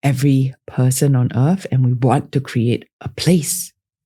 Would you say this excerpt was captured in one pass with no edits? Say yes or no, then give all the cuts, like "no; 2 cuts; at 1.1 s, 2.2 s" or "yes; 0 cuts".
yes; 0 cuts